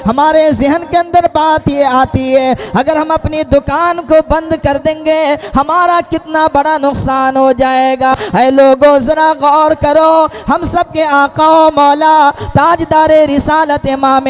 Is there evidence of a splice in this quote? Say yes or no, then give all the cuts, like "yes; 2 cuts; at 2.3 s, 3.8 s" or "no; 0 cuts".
yes; 1 cut; at 8.1 s